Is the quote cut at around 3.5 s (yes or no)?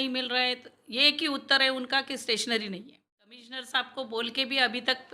yes